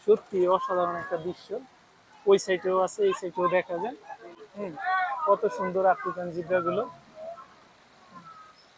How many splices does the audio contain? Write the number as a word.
zero